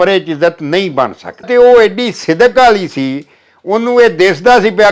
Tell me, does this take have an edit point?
yes; 1 cut; at 1.4 s

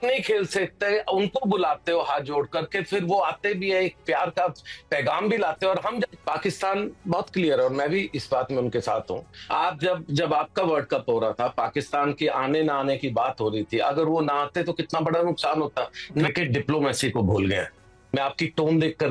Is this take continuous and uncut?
no; 3 cuts; at 6.1 s, 9.4 s, 16.3 s

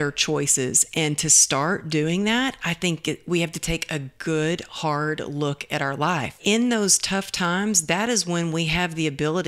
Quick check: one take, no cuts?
no; 1 cut; at 6.4 s

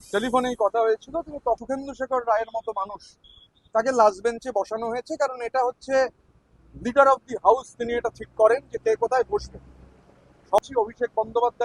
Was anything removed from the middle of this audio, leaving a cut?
yes; 2 cuts; at 1.6 s, 10.6 s

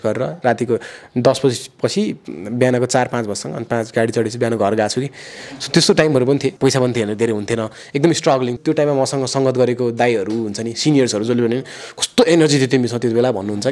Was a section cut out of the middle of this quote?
yes; 2 cuts; at 6.5 s, 8.5 s

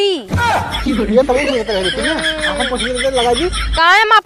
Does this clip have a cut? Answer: no; 0 cuts

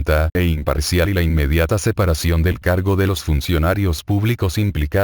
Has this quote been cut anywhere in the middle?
yes; 1 cut; at 3.1 s

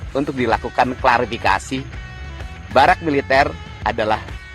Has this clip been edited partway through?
yes; 1 cut; at 2.3 s

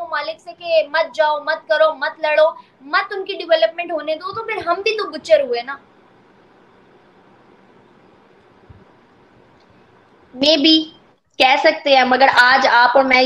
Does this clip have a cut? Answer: no; 0 cuts

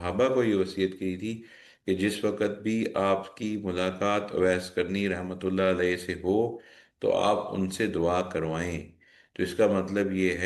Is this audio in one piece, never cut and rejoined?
yes; 0 cuts

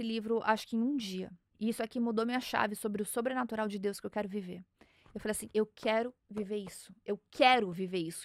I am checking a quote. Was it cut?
yes; 1 cut; at 1.4 s

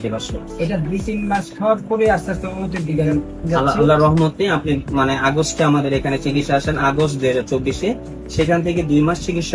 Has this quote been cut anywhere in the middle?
no; 0 cuts

